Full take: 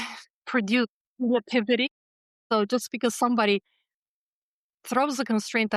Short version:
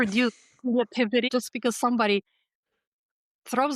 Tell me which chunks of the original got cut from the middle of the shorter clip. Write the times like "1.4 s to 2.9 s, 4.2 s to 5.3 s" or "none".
1.9 s to 2.7 s